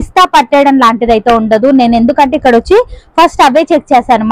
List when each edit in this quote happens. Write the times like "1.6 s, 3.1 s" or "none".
none